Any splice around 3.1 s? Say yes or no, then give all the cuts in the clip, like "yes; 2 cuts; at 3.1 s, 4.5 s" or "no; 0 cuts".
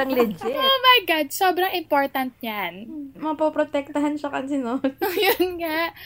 yes; 1 cut; at 3.1 s